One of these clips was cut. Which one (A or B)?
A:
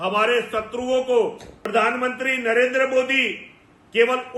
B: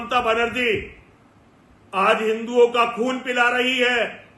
A